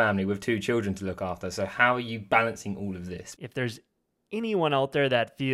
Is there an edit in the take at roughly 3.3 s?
yes; 1 cut; at 3.3 s

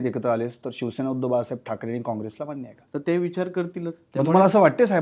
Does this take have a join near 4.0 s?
yes; 2 cuts; at 2.7 s, 4.0 s

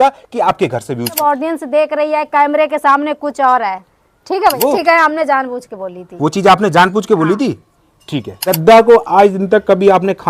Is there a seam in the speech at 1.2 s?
yes; 3 cuts; at 1.2 s, 4.5 s, 8.6 s

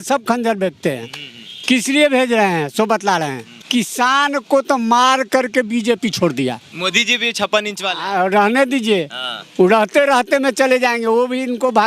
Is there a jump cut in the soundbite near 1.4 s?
no; 2 cuts; at 3.7 s, 6.7 s

